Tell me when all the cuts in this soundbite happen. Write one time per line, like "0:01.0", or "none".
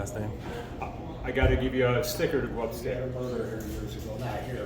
0:02.9

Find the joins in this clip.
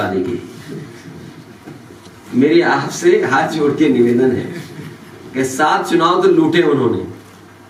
none

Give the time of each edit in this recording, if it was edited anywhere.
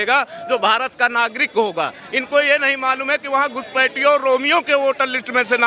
none

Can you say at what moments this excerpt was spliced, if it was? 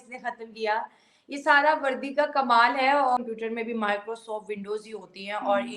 0:03.2

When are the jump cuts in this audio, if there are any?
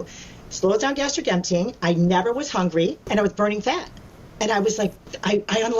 0:03.1

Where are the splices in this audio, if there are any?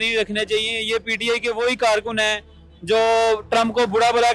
none

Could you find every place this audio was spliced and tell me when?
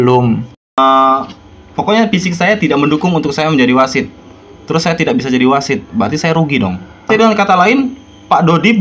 0:00.8
0:07.1

